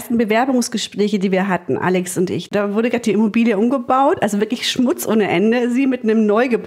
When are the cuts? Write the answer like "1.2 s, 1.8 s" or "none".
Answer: 2.5 s